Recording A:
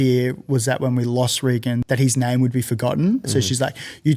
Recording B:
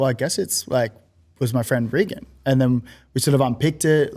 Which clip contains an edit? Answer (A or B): A